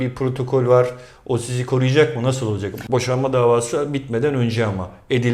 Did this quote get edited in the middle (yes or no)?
yes